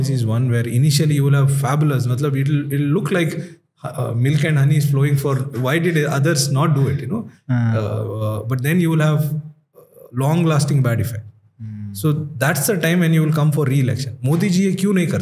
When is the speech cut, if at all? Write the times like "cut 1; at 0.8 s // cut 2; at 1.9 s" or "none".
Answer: none